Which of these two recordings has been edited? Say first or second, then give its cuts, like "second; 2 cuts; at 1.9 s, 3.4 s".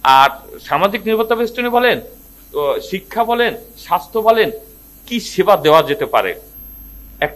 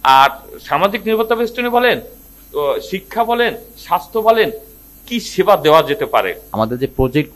second; 1 cut; at 6.4 s